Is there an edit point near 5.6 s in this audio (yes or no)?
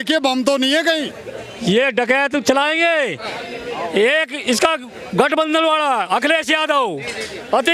no